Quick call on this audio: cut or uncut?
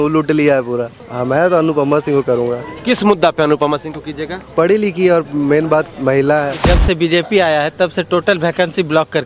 cut